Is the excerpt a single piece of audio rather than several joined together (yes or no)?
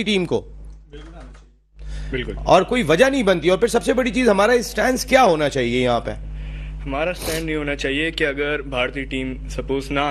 yes